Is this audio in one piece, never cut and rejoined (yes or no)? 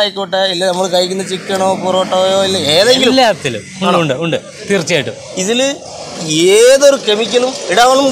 yes